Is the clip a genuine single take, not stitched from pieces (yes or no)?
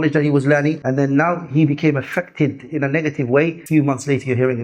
no